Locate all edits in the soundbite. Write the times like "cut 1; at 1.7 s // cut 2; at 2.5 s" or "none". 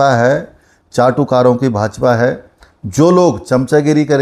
none